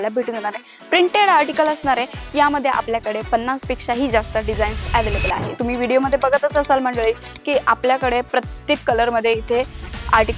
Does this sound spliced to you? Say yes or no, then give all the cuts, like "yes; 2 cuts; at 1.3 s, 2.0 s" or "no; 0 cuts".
yes; 1 cut; at 5.5 s